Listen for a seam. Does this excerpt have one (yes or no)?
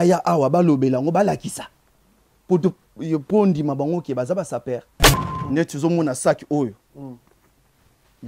yes